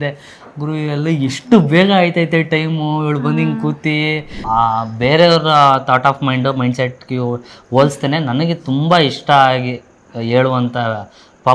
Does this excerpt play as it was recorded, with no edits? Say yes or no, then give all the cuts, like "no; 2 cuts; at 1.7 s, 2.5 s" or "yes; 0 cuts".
no; 1 cut; at 4.3 s